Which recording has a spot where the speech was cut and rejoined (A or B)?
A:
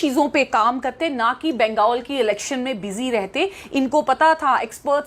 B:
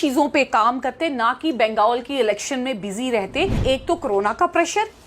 B